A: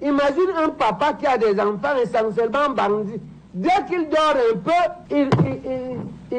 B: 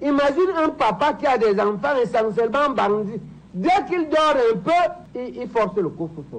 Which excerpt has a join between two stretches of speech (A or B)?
B